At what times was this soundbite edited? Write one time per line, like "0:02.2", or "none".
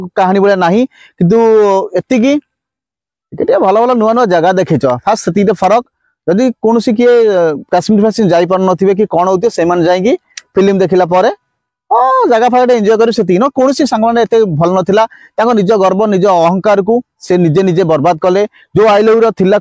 none